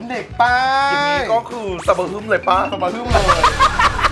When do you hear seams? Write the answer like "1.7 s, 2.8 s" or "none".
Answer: none